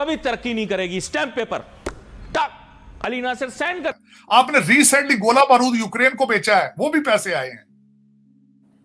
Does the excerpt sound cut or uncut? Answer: cut